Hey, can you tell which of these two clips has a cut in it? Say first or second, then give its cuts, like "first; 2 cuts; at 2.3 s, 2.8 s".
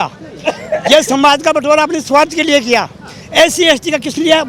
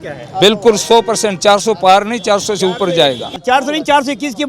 second; 1 cut; at 3.4 s